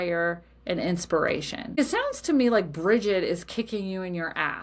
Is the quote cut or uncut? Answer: cut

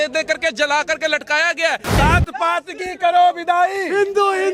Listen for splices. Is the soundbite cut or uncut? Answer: cut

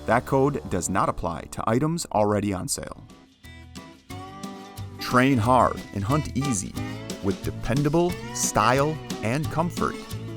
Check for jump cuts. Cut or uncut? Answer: cut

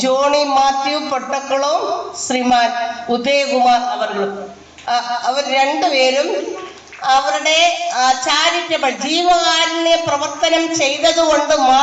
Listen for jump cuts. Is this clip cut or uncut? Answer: uncut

